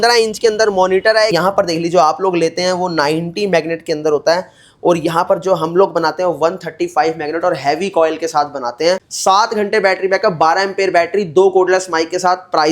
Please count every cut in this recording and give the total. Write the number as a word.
two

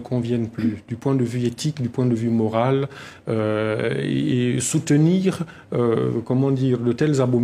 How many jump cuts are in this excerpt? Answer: one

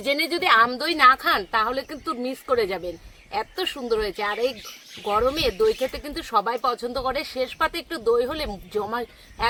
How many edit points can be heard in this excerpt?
zero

